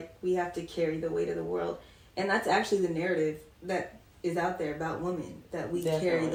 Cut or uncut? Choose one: uncut